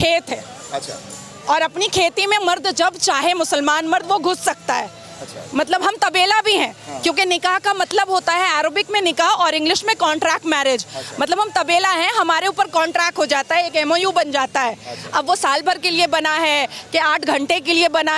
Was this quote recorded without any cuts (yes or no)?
yes